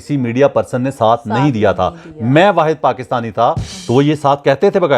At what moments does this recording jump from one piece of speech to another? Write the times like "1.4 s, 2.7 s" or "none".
3.7 s

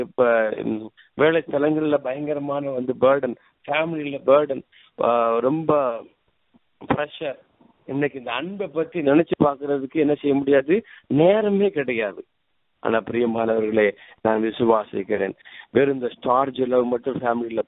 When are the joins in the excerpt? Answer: 15.4 s

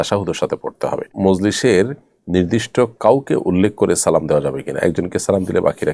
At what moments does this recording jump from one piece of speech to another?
1.1 s

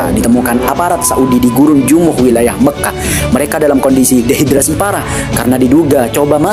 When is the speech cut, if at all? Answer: none

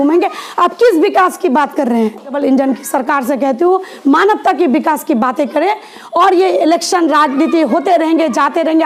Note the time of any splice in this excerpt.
none

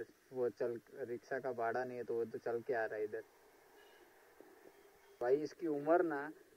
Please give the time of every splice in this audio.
5.2 s

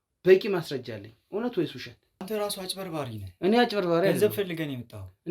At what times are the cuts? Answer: 2.2 s

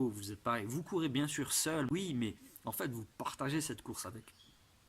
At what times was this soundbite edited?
1.9 s

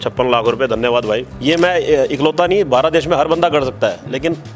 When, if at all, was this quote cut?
1.3 s

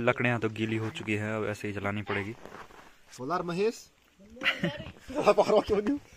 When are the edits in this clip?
none

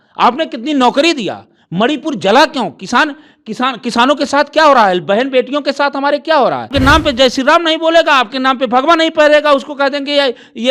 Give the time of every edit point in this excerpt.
6.7 s

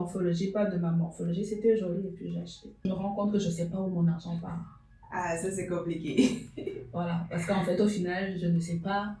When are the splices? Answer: 2.9 s

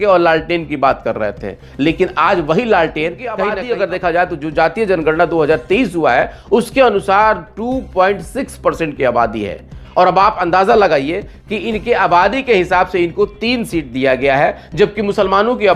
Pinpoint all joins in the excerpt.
3.4 s

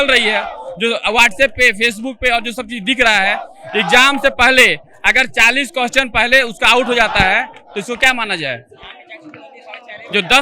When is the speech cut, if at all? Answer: none

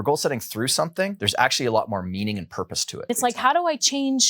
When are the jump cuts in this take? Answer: 1.2 s, 3.1 s

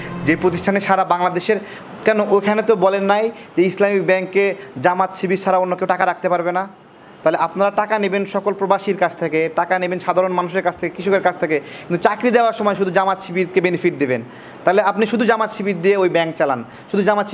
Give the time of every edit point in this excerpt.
none

